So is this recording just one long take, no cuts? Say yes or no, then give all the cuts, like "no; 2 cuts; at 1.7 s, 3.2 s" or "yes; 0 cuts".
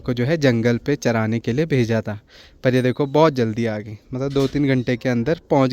yes; 0 cuts